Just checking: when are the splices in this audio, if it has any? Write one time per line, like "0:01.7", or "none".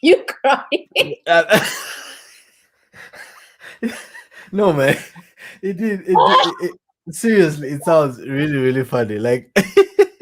none